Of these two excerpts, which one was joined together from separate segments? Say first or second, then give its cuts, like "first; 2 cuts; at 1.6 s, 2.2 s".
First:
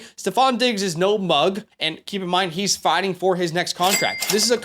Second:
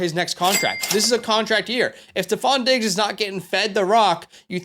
first; 1 cut; at 1.7 s